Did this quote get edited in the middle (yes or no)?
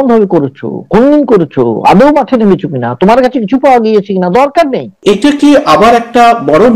yes